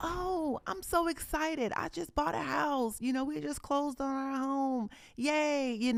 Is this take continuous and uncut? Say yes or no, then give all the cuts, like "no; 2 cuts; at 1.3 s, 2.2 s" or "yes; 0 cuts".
yes; 0 cuts